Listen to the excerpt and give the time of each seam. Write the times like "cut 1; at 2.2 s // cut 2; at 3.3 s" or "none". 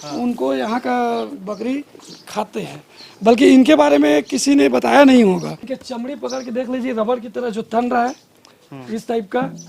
cut 1; at 5.7 s